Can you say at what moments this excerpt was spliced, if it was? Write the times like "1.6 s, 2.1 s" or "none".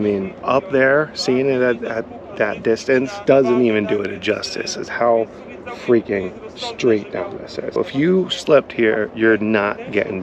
7.7 s